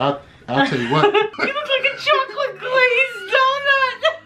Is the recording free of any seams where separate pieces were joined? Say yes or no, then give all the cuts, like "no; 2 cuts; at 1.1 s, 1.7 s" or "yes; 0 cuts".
no; 1 cut; at 1.3 s